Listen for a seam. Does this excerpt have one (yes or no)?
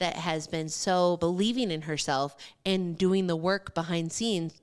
yes